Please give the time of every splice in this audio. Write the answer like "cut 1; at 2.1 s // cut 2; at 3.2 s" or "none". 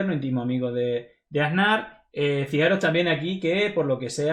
none